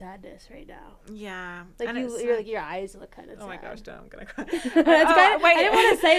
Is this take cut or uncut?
uncut